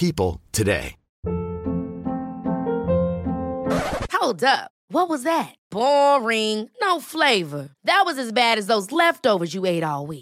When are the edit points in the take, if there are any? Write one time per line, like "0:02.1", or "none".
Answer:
0:01.1